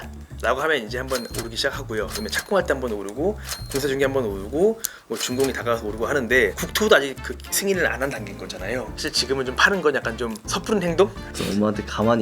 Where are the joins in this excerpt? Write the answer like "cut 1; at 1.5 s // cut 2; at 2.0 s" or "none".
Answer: cut 1; at 10.5 s // cut 2; at 11.3 s

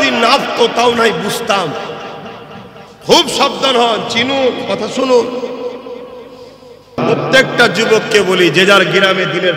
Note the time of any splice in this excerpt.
cut 1; at 7.0 s

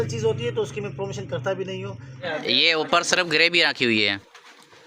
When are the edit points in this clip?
cut 1; at 2.3 s

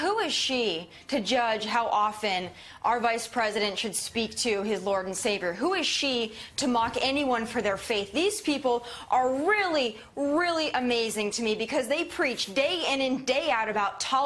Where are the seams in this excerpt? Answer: cut 1; at 2.2 s

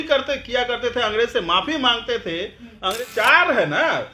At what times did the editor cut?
cut 1; at 2.9 s

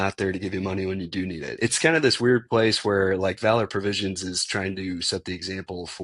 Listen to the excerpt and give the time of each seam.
cut 1; at 1.4 s

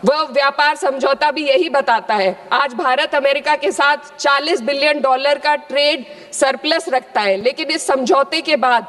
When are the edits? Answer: none

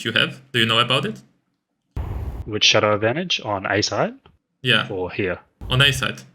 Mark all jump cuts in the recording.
none

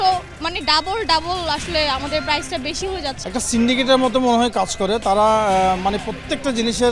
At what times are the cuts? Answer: cut 1; at 3.2 s

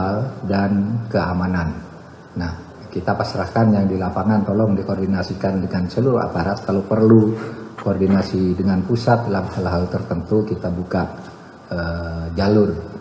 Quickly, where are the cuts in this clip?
none

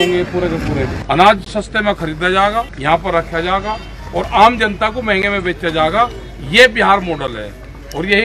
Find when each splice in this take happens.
cut 1; at 1.0 s // cut 2; at 2.7 s

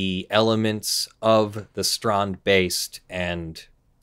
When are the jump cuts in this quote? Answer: none

